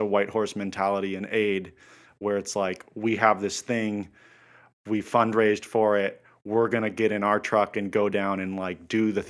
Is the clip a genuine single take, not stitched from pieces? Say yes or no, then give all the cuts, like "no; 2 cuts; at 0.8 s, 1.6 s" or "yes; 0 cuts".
yes; 0 cuts